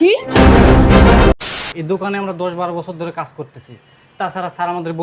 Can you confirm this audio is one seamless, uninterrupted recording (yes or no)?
no